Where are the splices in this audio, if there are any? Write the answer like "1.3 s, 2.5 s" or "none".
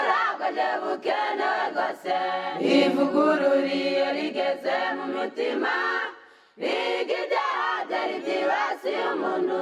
2.4 s